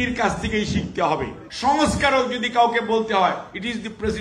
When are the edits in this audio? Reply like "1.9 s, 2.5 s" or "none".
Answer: 1.4 s

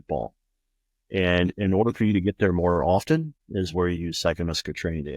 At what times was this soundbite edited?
3.4 s

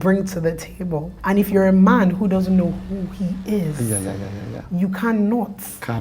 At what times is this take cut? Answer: 1.1 s

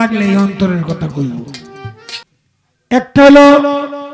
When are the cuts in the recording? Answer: 2.2 s

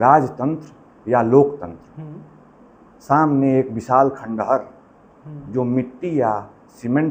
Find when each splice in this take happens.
none

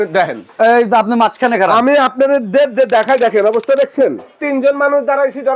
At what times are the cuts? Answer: 4.4 s

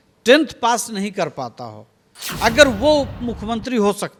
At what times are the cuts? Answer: none

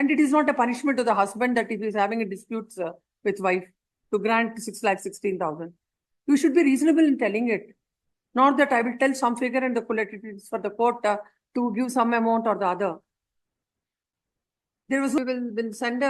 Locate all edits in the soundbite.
15.2 s

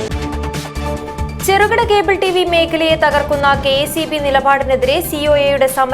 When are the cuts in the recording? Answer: none

